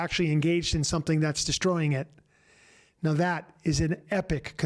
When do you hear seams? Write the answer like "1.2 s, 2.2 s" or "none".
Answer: none